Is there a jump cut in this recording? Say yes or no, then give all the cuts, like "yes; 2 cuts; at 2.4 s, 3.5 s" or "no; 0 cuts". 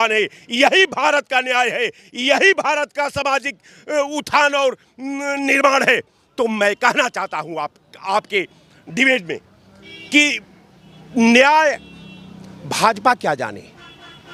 no; 0 cuts